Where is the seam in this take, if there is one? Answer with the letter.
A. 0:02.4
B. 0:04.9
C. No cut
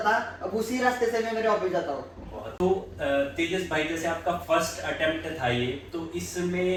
C